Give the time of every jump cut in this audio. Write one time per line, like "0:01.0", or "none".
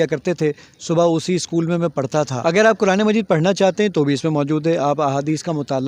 0:02.3